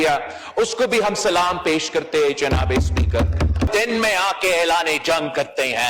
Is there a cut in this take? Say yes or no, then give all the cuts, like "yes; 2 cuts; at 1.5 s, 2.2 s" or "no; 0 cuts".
yes; 1 cut; at 3.7 s